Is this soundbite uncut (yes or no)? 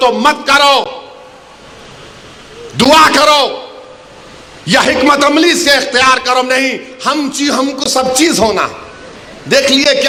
yes